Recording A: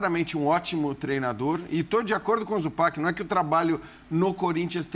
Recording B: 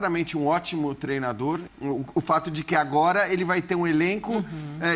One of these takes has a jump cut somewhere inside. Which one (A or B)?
B